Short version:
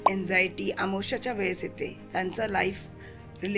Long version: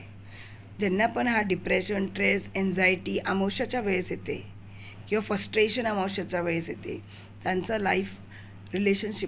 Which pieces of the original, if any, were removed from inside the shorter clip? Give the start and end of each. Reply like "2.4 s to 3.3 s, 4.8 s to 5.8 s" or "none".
4.5 s to 7.3 s